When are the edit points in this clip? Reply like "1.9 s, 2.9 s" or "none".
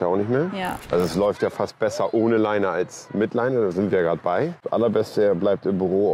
0.8 s, 4.6 s